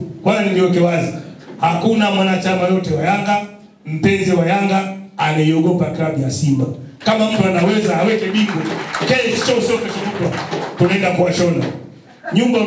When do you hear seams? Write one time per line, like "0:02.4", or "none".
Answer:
none